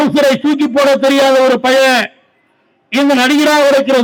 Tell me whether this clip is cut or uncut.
uncut